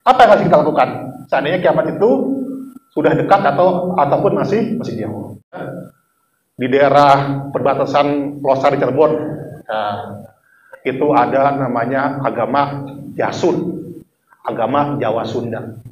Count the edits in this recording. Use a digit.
1